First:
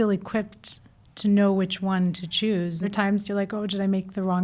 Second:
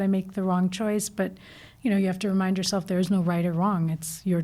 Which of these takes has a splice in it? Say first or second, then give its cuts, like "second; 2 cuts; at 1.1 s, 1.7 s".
first; 1 cut; at 2.9 s